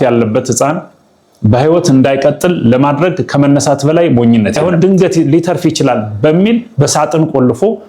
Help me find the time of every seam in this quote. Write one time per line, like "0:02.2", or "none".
0:04.6